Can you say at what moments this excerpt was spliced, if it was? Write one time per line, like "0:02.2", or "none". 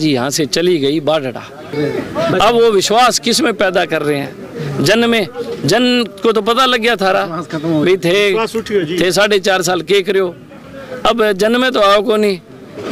0:01.7